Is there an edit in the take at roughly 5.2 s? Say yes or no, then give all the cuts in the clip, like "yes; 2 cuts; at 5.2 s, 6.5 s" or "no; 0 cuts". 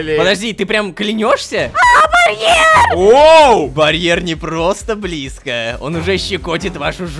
no; 3 cuts; at 1.7 s, 2.9 s, 3.7 s